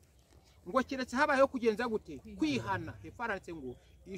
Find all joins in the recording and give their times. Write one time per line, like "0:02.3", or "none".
none